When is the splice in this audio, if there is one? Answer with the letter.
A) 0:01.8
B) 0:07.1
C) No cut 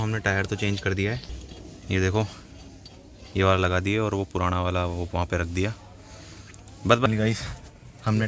B